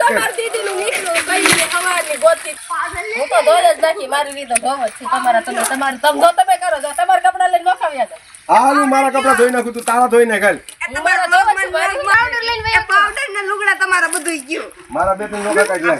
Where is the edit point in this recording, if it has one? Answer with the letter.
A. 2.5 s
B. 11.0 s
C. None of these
A